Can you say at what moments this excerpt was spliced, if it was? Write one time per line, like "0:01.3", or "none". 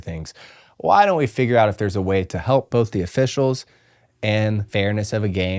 0:04.6